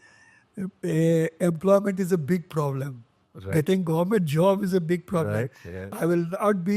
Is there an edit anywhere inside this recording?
no; 0 cuts

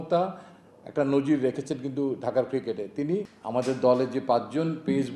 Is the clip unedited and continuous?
no; 1 cut; at 3.3 s

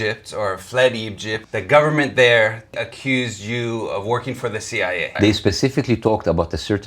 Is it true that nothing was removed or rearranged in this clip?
no; 3 cuts; at 1.3 s, 2.7 s, 5.1 s

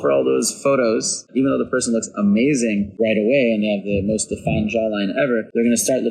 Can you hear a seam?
yes; 1 cut; at 1.3 s

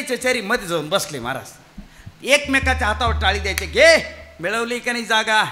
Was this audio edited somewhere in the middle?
no; 0 cuts

